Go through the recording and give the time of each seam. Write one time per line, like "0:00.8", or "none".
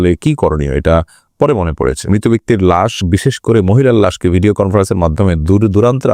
0:02.1

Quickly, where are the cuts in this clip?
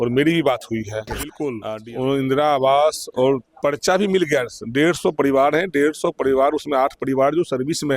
0:01.5

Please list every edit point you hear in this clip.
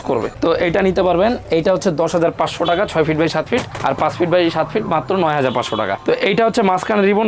0:06.0

